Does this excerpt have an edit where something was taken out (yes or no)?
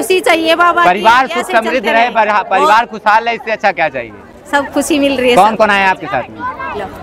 no